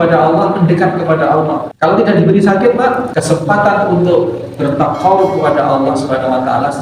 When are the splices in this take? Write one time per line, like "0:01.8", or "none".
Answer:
0:01.7
0:03.1